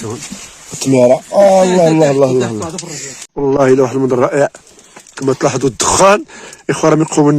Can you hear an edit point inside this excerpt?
yes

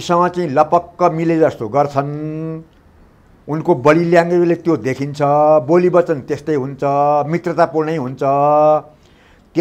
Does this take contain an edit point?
no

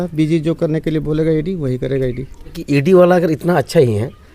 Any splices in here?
yes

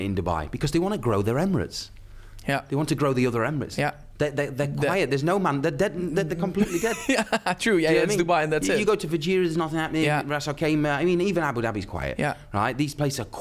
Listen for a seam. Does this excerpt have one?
no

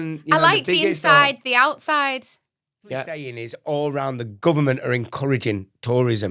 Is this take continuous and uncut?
no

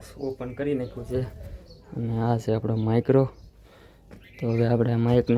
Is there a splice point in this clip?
no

